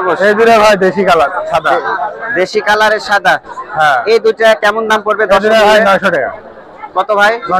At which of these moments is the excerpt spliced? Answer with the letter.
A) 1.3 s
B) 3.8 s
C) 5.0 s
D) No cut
D